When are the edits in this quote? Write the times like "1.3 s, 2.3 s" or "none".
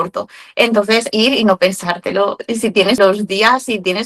1.1 s, 3.0 s